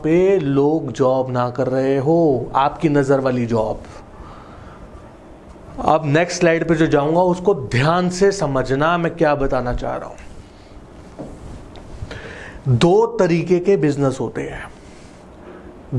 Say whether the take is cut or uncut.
uncut